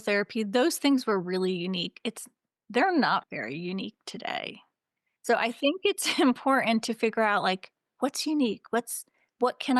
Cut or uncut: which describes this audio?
uncut